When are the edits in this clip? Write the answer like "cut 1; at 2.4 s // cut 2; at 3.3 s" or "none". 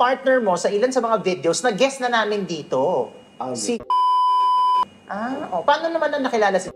none